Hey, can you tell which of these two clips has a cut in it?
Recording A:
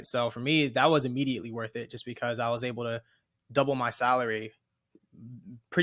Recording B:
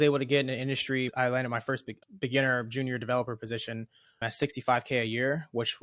B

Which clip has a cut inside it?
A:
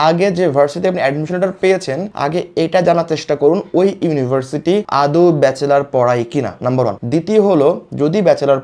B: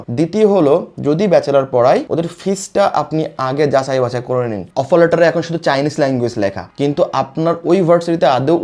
B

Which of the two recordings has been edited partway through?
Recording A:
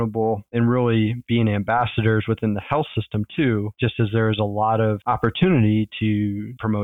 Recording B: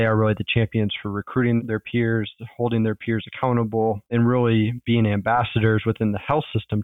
A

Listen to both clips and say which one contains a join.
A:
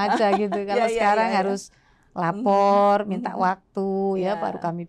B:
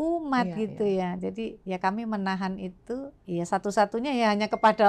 B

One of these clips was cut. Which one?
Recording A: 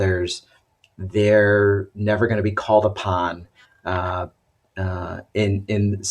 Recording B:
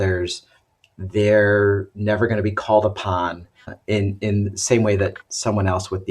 B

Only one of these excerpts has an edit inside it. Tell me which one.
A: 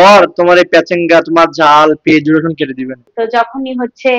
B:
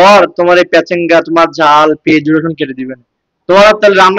A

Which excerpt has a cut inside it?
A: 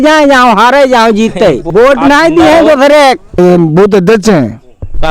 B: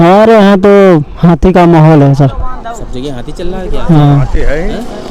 A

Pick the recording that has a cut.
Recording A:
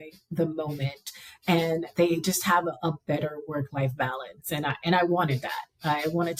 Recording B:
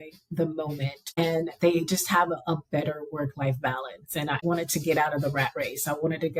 B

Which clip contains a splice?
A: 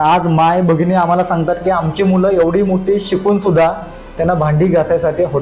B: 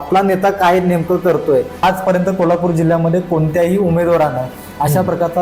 B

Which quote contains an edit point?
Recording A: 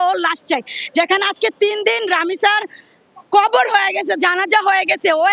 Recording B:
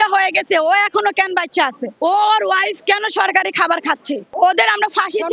B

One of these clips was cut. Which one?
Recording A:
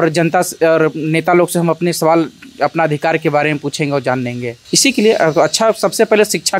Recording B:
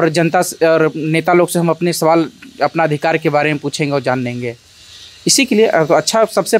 A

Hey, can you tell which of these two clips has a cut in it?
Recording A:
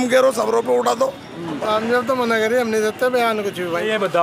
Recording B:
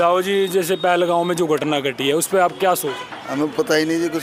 A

